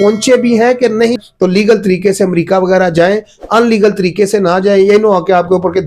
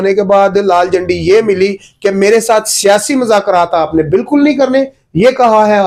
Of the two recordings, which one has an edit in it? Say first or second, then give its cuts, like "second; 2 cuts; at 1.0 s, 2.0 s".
first; 1 cut; at 1.2 s